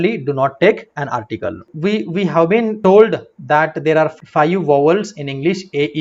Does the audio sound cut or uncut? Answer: cut